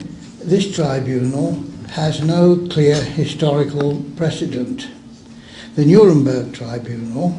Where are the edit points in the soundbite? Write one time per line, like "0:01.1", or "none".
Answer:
0:04.0